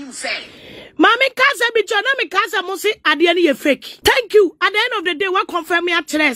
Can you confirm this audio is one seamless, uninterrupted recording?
no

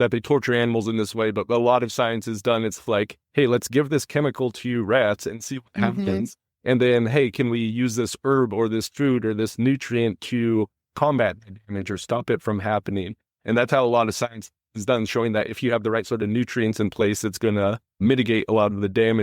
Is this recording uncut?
yes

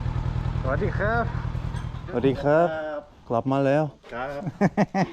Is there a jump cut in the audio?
yes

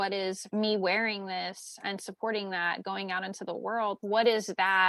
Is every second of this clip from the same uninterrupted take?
yes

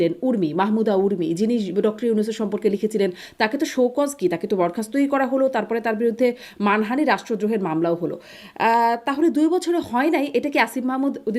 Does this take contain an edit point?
no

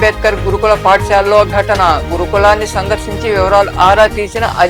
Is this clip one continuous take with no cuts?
yes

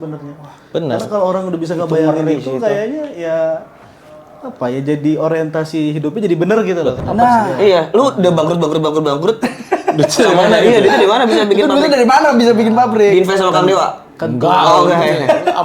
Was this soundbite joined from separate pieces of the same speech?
yes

